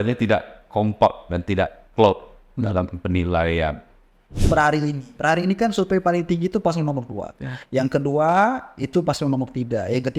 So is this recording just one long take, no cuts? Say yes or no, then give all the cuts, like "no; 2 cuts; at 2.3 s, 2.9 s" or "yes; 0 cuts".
no; 1 cut; at 4.3 s